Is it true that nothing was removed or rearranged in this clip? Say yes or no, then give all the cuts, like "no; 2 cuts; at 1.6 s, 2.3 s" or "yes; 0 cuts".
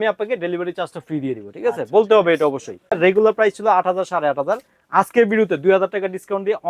no; 1 cut; at 3.0 s